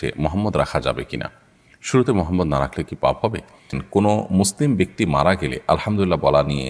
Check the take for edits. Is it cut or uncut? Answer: cut